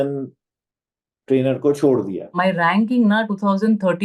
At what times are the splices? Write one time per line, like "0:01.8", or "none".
0:02.3